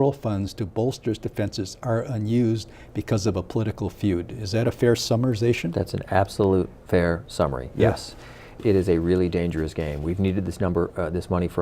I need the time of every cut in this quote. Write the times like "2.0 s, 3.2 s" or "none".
8.5 s